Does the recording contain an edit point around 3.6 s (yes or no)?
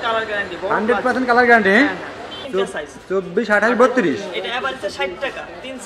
no